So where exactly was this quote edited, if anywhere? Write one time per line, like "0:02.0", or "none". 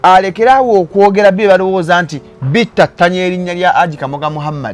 none